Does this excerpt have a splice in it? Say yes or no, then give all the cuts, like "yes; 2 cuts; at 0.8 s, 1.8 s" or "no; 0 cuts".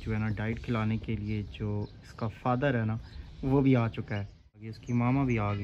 yes; 1 cut; at 4.7 s